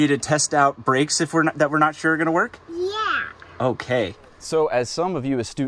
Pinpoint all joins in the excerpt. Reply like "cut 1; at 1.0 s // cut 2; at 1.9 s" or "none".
cut 1; at 4.3 s

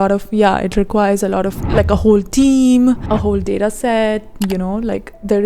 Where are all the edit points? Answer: cut 1; at 3.0 s // cut 2; at 4.3 s

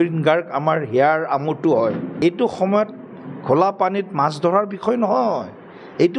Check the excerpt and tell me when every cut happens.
cut 1; at 2.1 s

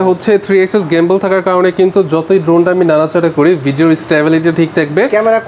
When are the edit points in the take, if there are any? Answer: none

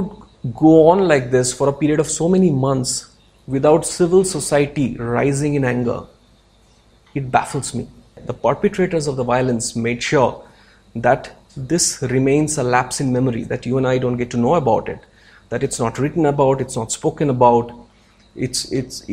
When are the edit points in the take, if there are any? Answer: cut 1; at 8.2 s

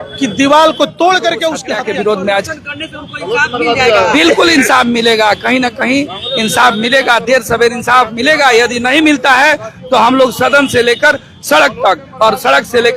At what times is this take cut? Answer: cut 1; at 1.6 s

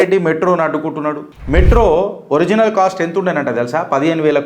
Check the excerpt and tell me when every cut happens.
cut 1; at 1.3 s

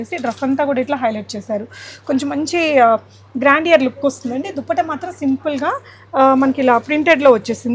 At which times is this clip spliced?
none

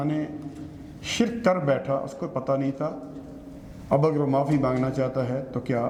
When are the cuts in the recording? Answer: none

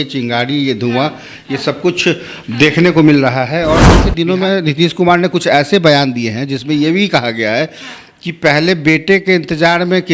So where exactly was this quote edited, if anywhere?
cut 1; at 4.1 s

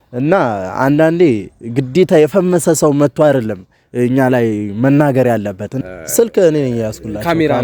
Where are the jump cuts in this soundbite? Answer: cut 1; at 5.7 s

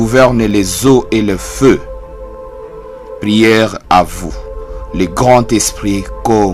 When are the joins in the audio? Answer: cut 1; at 1.8 s // cut 2; at 3.2 s

